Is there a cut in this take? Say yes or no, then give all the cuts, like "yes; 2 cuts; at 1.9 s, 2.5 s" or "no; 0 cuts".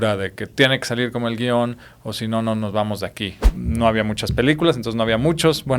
yes; 1 cut; at 3.5 s